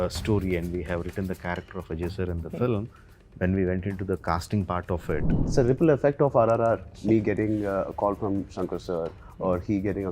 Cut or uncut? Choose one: cut